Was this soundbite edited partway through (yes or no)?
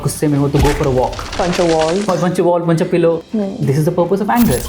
yes